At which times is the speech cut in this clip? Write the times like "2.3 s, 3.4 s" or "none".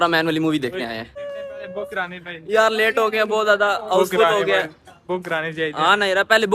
1.2 s, 4.9 s